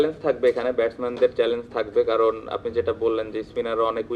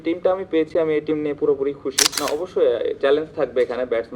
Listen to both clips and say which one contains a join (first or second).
second